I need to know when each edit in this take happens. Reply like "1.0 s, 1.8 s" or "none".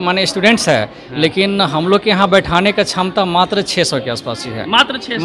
none